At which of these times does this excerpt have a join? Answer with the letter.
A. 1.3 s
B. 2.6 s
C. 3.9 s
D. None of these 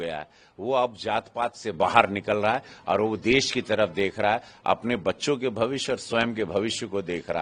D